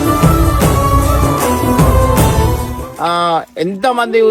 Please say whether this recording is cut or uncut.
cut